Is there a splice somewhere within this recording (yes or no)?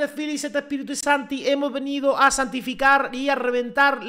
no